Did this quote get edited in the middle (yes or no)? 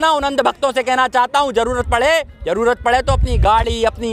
no